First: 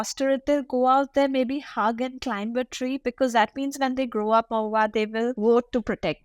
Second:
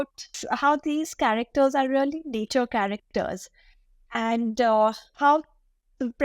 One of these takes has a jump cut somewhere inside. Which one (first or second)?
first